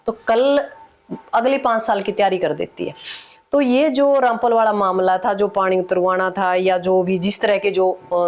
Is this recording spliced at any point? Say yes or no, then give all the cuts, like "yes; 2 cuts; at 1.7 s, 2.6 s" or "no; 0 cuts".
no; 0 cuts